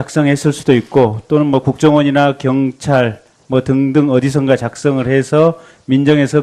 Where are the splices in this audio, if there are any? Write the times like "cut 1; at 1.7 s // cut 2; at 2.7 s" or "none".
cut 1; at 3.0 s